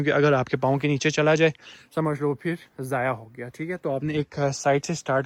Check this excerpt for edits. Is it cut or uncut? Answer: uncut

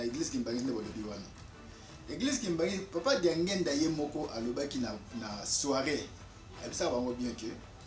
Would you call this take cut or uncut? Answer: uncut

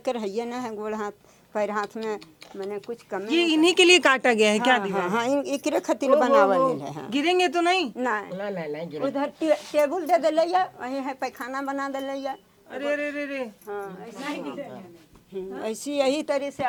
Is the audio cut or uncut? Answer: uncut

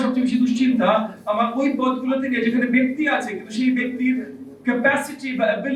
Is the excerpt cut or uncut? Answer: uncut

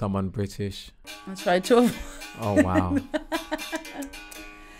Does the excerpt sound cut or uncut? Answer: cut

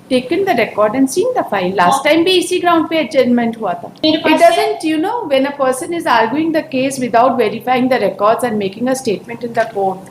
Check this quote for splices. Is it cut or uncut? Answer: cut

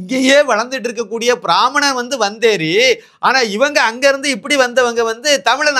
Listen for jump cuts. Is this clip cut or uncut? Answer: uncut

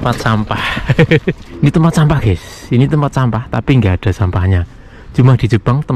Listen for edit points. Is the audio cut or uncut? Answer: cut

